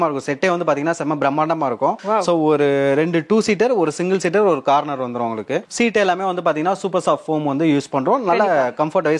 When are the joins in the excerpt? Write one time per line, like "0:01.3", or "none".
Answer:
none

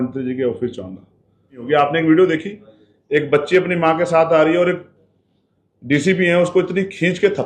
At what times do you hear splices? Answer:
0:01.6

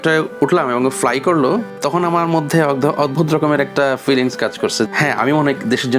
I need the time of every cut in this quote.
0:01.7
0:04.9

